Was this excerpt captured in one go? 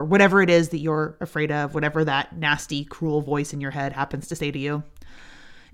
yes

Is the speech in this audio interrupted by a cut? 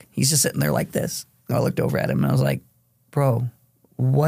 yes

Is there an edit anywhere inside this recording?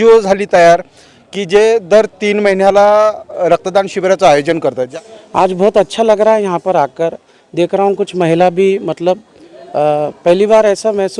yes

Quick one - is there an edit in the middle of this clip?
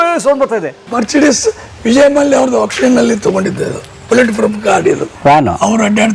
yes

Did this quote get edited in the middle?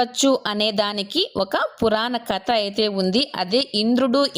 no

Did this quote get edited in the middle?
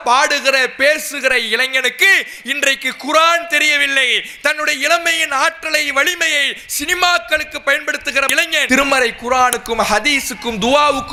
no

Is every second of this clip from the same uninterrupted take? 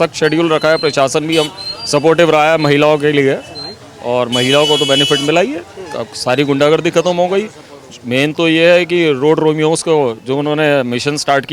yes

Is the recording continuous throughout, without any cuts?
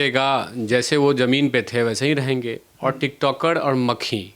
yes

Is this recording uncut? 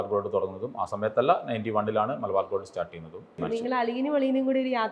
no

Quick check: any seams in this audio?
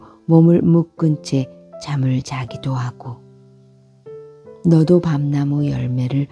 yes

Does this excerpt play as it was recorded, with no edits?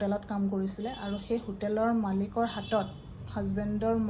yes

